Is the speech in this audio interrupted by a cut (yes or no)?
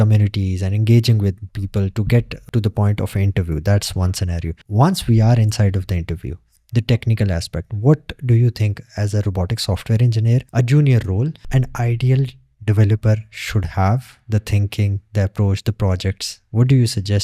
yes